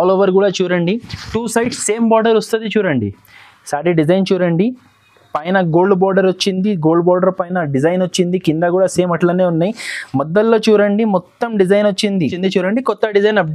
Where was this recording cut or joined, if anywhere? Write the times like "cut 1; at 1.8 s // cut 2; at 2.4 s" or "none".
cut 1; at 12.3 s